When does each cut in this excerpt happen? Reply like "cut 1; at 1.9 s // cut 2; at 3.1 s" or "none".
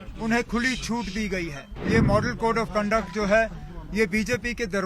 cut 1; at 1.8 s